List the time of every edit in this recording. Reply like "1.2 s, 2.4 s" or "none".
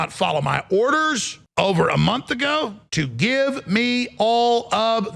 1.3 s, 2.8 s

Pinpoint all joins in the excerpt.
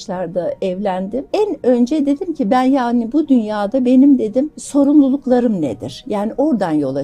1.3 s, 4.6 s

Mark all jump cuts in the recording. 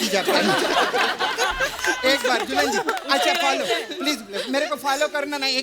none

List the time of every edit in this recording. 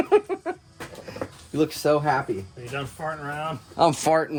none

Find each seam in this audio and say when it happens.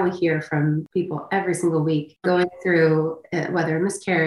0.9 s, 2.1 s

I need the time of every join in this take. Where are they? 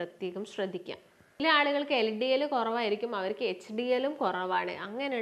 1.4 s

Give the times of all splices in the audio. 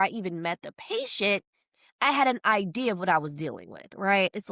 none

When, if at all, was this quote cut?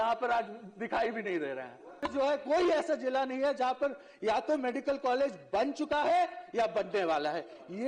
2.1 s

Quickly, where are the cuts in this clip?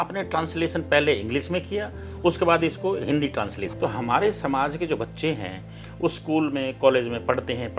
3.6 s

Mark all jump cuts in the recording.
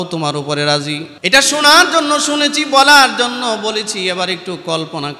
1.1 s

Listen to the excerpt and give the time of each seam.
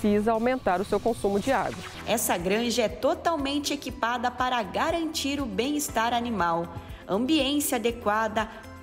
1.9 s

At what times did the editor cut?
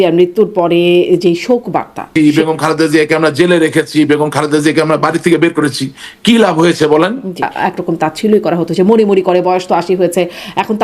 2.1 s, 7.5 s

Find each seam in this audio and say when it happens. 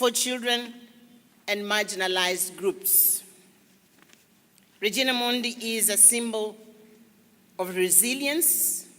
7.1 s

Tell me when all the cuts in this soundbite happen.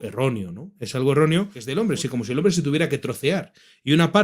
1.6 s

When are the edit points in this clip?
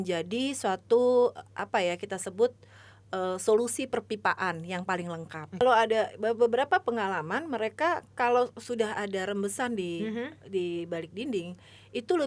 5.6 s

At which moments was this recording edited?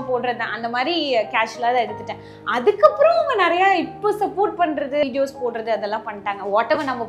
5.0 s

